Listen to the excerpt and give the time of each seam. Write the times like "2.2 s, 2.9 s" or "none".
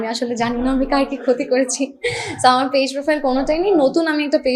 none